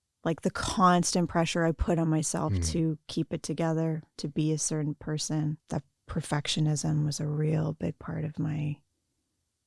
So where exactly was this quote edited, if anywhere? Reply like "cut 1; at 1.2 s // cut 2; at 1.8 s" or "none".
cut 1; at 5.6 s